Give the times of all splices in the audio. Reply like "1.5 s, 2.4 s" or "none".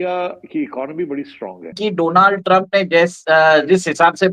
1.8 s